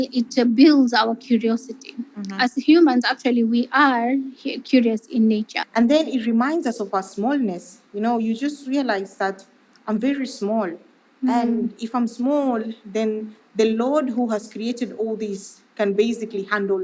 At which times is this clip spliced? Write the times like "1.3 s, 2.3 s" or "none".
5.6 s